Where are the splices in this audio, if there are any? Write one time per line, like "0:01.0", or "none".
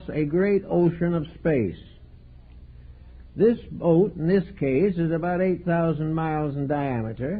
0:01.0